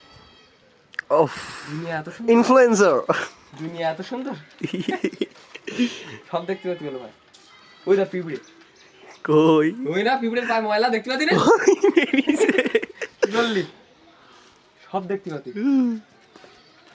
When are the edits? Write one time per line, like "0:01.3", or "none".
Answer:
none